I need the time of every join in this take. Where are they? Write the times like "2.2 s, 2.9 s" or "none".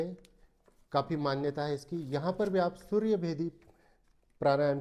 none

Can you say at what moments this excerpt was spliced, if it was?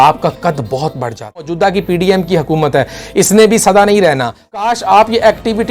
1.5 s, 4.6 s

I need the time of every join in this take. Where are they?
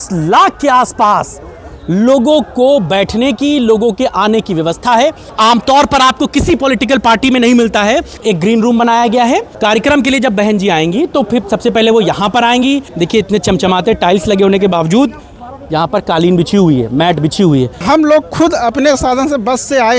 5.3 s, 8.1 s, 9.5 s, 12.9 s, 17.8 s

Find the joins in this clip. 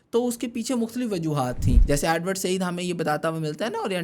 1.8 s

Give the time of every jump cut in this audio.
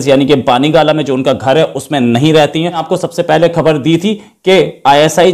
2.8 s

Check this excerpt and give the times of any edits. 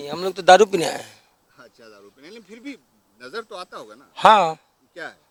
none

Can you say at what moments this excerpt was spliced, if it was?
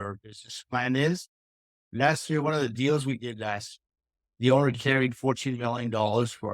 1.8 s

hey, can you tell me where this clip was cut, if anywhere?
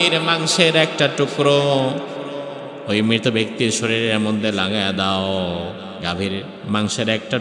6.2 s

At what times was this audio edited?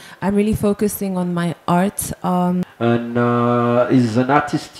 2.6 s

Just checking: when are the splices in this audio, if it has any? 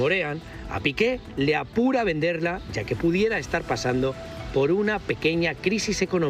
none

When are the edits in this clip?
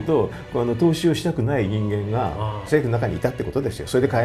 none

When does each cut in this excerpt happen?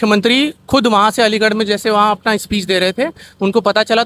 none

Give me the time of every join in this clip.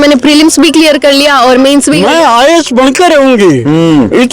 1.9 s

